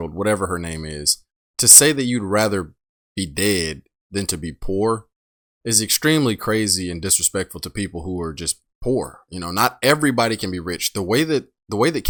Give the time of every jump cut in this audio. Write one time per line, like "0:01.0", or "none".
none